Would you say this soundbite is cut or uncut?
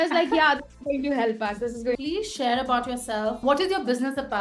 cut